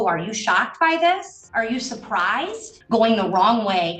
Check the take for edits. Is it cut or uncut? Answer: cut